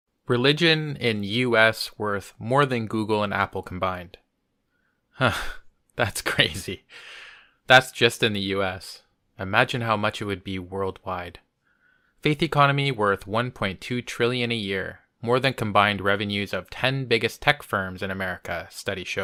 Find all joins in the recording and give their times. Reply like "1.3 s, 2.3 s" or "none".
none